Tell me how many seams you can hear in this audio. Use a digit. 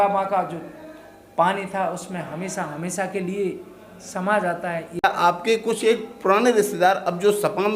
1